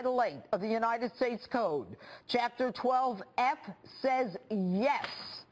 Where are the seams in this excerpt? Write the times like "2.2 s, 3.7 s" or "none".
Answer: 4.4 s

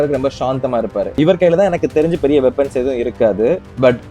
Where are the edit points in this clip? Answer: 1.2 s

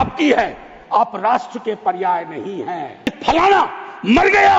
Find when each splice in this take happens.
3.2 s

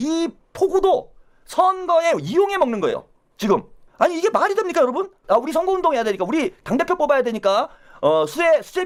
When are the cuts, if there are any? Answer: none

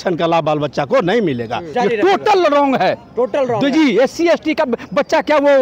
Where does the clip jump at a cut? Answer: 1.7 s

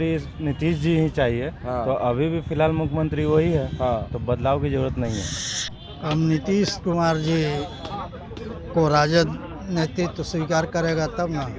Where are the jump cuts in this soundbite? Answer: 5.4 s

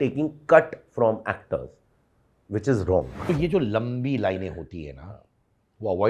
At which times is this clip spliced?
3.2 s

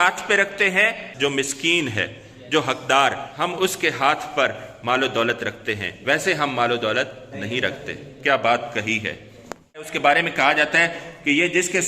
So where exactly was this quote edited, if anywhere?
1.1 s, 3.3 s, 9.9 s

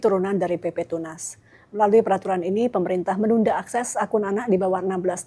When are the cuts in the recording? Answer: none

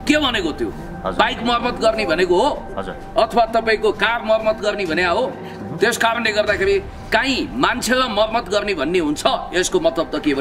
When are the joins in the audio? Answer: none

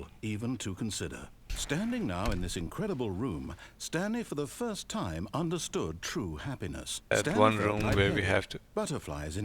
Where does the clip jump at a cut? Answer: 1.5 s, 7.1 s

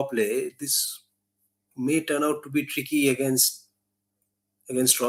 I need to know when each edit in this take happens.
none

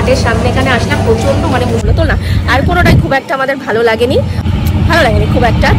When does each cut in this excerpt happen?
1.8 s, 4.4 s

